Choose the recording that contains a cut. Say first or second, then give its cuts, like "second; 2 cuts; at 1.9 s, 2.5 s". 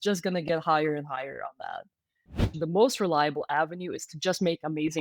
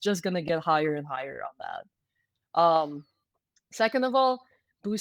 first; 1 cut; at 2.5 s